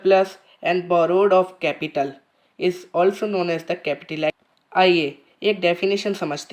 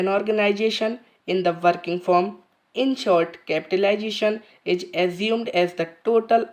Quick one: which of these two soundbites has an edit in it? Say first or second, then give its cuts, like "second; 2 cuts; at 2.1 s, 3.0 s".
first; 1 cut; at 4.5 s